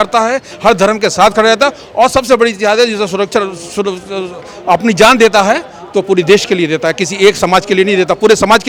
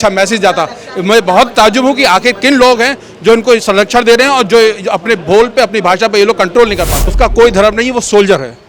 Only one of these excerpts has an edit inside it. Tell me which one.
second; 1 cut; at 7.0 s

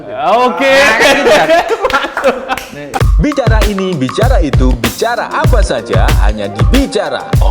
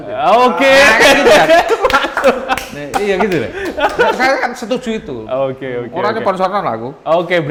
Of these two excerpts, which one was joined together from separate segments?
first; 1 cut; at 3.0 s

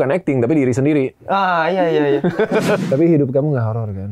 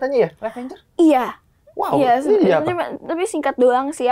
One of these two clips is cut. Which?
first; 1 cut; at 2.8 s

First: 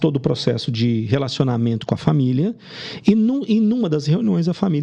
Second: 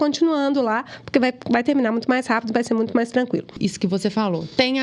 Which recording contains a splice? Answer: second; 1 cut; at 3.5 s

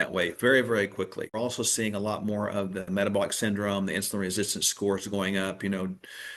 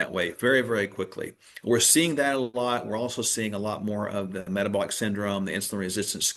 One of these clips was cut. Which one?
first; 1 cut; at 1.3 s

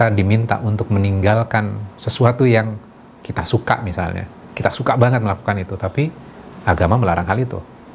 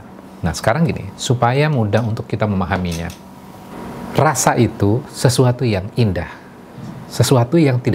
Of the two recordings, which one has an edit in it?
second; 1 cut; at 3.7 s

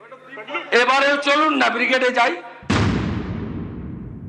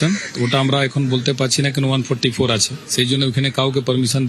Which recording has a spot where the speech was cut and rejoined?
first; 1 cut; at 2.5 s

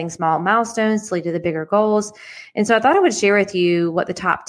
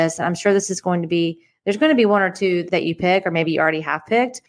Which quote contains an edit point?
second; 1 cut; at 2.6 s

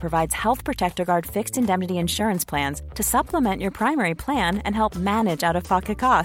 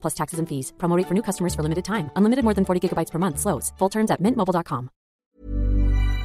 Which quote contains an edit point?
second; 1 cut; at 5.2 s

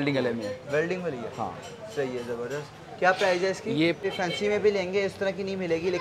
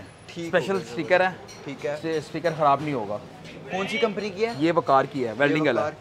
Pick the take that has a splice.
first; 1 cut; at 4.0 s

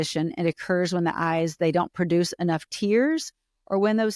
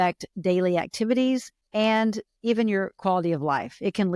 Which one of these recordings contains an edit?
second; 2 cuts; at 1.6 s, 3.0 s

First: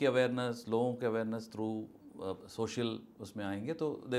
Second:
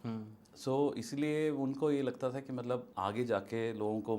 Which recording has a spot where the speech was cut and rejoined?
second; 1 cut; at 2.9 s

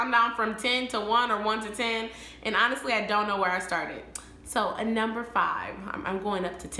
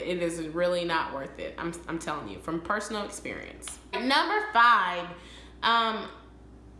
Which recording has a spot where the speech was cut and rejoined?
second; 1 cut; at 3.8 s

